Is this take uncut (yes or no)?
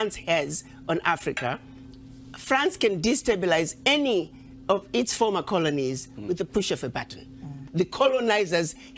no